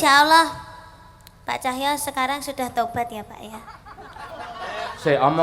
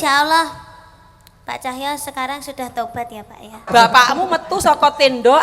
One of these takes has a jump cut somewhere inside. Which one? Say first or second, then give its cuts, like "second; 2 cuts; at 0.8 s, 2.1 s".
second; 1 cut; at 3.6 s